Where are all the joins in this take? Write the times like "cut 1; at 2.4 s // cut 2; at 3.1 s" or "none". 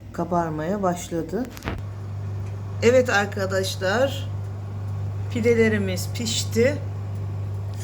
cut 1; at 1.8 s

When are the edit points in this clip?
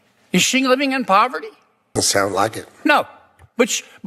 cut 1; at 1.9 s

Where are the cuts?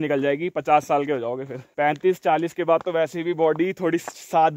cut 1; at 1.6 s

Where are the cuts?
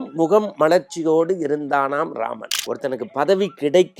cut 1; at 2.5 s

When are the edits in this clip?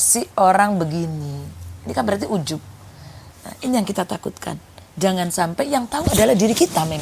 cut 1; at 3.2 s

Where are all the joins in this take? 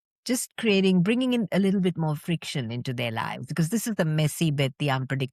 none

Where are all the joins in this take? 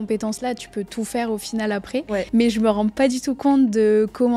cut 1; at 2.3 s

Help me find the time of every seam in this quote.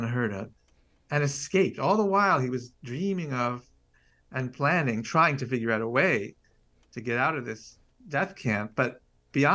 none

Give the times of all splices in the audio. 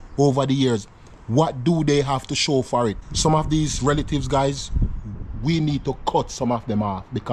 cut 1; at 3.0 s

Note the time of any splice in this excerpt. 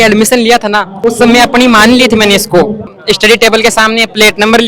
cut 1; at 3.0 s

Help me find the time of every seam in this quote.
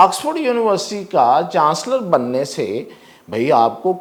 none

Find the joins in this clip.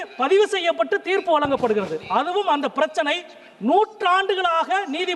none

